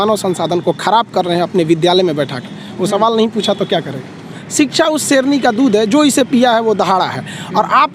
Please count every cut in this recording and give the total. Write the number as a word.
one